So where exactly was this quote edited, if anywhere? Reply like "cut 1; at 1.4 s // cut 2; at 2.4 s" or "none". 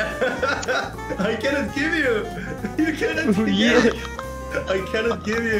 none